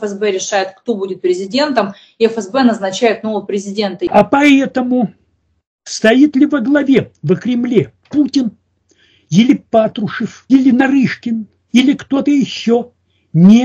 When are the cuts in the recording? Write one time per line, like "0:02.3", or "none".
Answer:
0:04.1
0:10.4

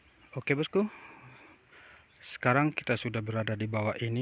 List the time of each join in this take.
none

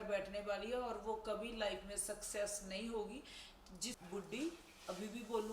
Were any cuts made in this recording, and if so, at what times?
0:03.9

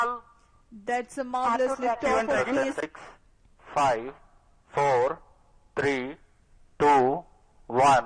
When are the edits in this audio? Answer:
0:02.8

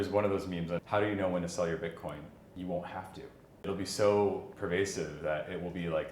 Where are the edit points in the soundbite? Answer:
0:00.8
0:02.4
0:03.7

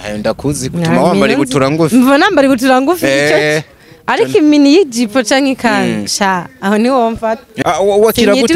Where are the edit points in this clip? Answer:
0:07.5

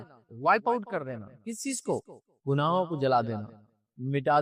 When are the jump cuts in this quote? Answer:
none

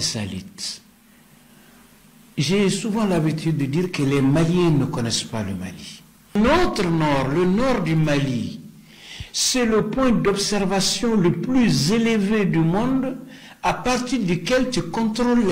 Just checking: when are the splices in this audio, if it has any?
0:06.4

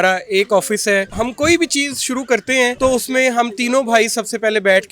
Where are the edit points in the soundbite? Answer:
0:01.1
0:02.8

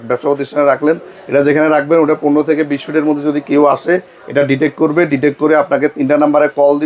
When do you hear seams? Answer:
none

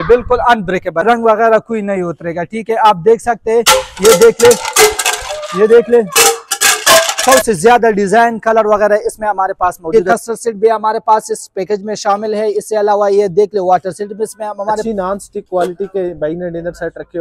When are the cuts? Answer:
0:01.0
0:07.2
0:09.9
0:14.8

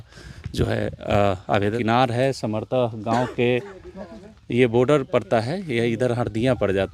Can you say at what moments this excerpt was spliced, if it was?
0:01.7

